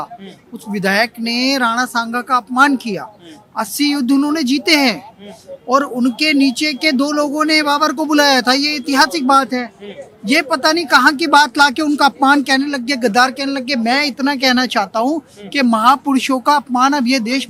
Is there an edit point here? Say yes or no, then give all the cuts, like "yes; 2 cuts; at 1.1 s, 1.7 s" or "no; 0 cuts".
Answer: no; 0 cuts